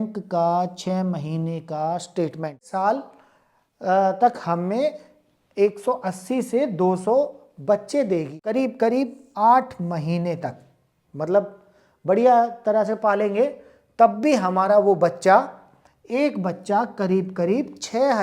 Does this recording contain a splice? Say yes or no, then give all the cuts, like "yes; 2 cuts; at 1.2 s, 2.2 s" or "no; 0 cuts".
yes; 2 cuts; at 2.6 s, 8.4 s